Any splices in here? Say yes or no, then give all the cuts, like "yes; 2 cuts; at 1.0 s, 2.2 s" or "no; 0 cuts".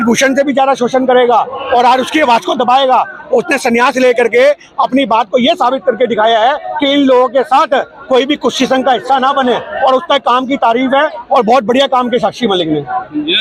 no; 0 cuts